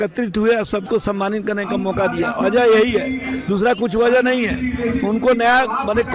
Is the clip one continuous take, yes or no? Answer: yes